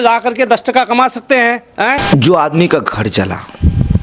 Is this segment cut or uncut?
cut